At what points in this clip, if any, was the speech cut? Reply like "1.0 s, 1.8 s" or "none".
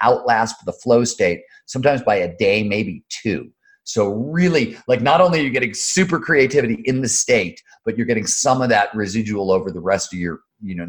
none